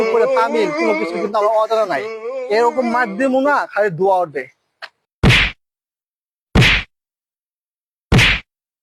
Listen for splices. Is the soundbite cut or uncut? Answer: uncut